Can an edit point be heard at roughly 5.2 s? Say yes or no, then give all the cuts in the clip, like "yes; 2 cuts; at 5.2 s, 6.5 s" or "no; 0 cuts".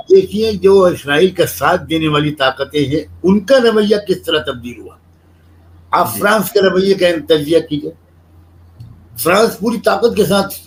no; 0 cuts